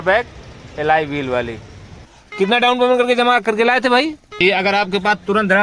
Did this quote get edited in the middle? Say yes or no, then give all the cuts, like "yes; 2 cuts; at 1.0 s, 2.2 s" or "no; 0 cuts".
yes; 2 cuts; at 2.2 s, 4.4 s